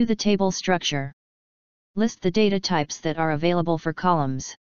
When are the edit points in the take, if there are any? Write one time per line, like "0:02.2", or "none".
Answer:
0:03.0